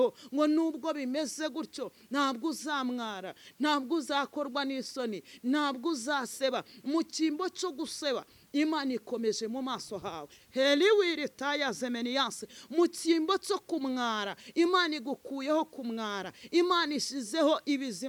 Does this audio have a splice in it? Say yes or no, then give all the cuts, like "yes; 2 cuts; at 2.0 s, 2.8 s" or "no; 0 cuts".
no; 0 cuts